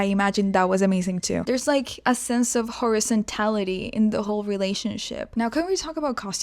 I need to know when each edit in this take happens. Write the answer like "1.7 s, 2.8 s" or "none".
1.6 s, 5.2 s